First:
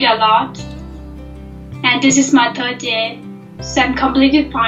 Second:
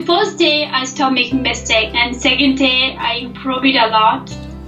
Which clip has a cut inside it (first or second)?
second